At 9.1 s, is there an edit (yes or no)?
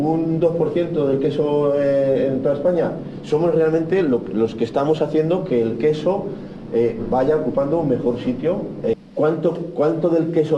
yes